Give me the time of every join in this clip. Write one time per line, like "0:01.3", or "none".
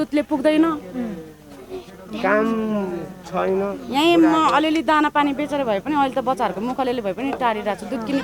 none